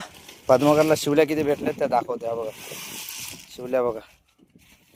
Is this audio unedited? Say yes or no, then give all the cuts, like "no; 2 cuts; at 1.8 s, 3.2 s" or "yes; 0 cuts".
yes; 0 cuts